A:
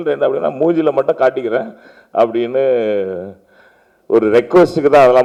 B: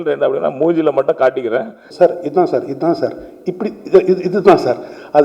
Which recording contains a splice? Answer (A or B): B